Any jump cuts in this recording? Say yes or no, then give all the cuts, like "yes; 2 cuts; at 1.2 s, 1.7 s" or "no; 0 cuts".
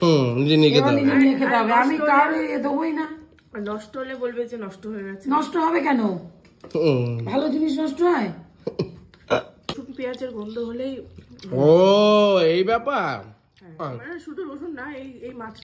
yes; 1 cut; at 9.7 s